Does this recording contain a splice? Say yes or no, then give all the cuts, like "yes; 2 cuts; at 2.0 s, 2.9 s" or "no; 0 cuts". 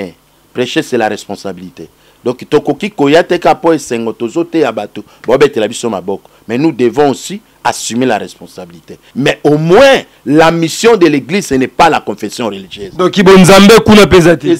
yes; 1 cut; at 9.0 s